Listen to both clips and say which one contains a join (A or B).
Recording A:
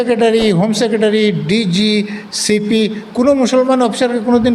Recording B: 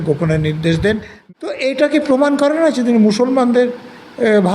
B